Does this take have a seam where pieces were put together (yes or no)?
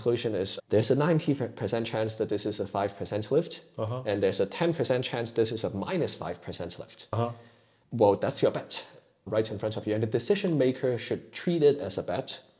no